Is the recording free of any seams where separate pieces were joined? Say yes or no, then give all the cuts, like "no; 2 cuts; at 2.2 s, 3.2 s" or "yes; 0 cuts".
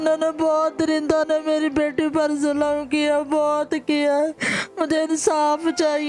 yes; 0 cuts